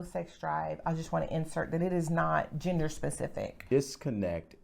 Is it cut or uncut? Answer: cut